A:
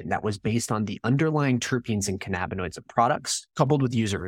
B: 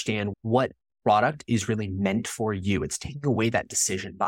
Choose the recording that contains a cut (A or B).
A